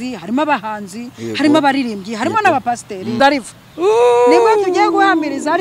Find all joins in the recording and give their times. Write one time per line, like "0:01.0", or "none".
0:03.2

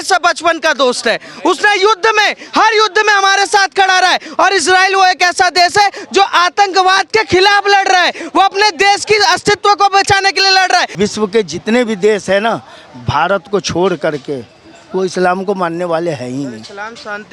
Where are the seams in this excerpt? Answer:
0:10.9

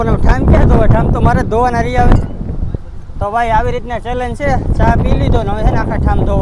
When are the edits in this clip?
none

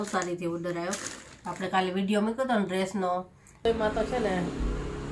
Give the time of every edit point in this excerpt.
0:03.6

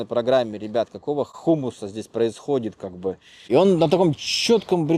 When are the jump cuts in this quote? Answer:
0:03.3

